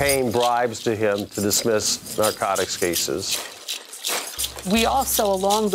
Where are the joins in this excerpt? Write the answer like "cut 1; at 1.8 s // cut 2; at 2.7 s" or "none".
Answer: cut 1; at 3.9 s